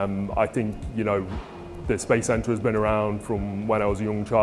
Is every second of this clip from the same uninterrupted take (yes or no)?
yes